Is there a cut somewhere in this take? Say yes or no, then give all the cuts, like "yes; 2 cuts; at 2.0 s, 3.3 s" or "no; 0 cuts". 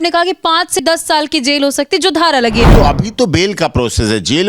yes; 1 cut; at 2.7 s